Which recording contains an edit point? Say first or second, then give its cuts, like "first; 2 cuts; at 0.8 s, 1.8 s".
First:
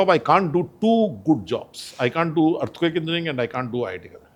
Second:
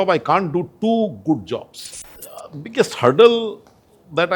second; 1 cut; at 1.8 s